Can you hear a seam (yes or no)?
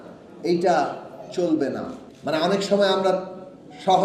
yes